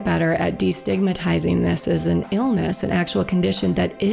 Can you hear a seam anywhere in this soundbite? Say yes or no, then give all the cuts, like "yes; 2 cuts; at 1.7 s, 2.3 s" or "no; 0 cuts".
no; 0 cuts